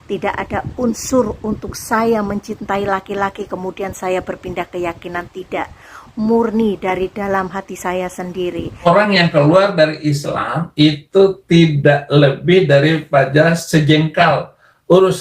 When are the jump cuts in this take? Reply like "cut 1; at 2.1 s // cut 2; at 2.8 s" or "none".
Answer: cut 1; at 8.7 s